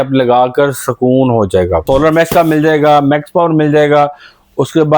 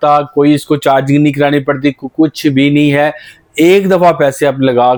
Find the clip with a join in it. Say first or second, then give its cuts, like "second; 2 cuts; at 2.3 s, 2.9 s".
first; 1 cut; at 1.8 s